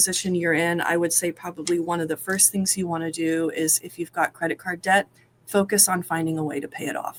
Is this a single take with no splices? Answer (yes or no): yes